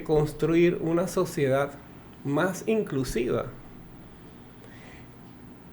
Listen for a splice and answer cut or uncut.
uncut